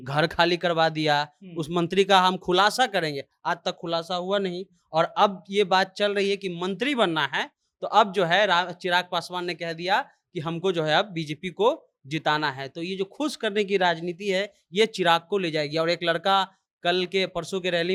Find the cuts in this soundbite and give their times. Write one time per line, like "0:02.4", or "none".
none